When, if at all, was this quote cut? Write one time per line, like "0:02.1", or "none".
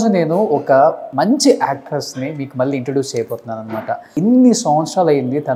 0:01.0
0:04.1